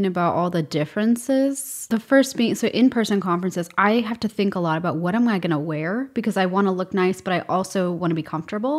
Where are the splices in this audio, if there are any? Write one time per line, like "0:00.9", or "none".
0:01.8